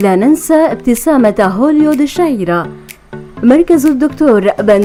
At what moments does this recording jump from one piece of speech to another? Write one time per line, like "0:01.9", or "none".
none